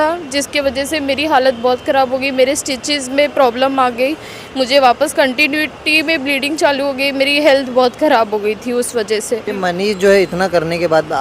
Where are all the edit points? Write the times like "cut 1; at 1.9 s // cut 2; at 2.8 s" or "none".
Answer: cut 1; at 9.5 s